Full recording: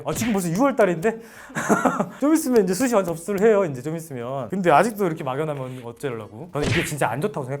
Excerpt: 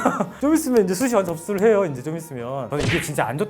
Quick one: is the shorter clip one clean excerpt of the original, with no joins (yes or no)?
no